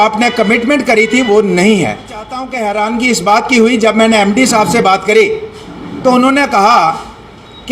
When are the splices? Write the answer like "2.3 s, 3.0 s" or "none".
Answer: 2.5 s